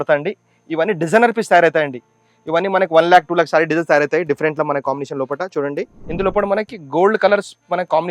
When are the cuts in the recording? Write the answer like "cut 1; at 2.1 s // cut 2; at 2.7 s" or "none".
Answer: cut 1; at 6.0 s